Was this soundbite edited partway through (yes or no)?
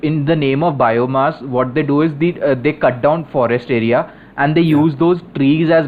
no